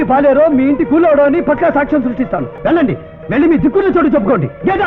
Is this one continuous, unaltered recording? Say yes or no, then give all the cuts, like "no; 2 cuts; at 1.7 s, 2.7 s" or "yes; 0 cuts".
no; 1 cut; at 2.5 s